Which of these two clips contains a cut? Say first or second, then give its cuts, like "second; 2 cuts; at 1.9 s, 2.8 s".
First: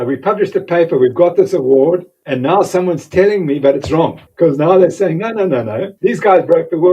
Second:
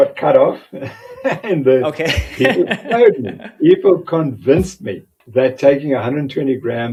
first; 3 cuts; at 2.2 s, 4.2 s, 5.9 s